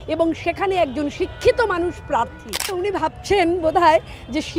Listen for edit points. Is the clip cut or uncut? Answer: cut